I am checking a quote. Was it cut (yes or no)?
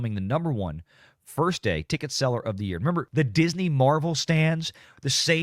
yes